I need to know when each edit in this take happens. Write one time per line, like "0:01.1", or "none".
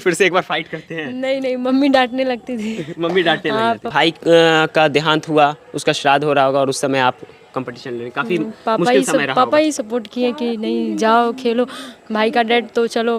0:03.9